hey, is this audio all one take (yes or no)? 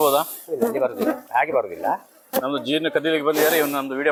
yes